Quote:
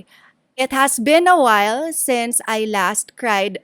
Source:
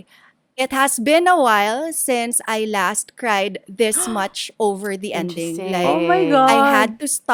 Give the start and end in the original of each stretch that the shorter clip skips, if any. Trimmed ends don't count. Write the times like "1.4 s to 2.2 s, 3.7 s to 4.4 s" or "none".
none